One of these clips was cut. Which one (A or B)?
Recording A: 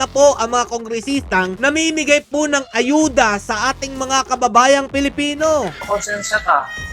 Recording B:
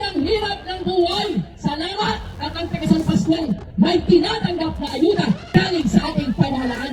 A